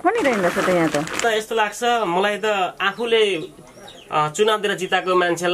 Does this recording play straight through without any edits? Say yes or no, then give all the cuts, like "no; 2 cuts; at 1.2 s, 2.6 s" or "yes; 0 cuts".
no; 1 cut; at 1.2 s